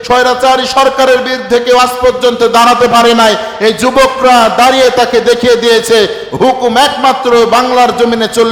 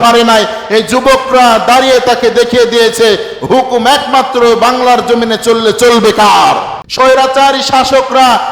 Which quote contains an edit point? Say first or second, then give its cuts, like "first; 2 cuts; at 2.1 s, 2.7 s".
second; 1 cut; at 6.8 s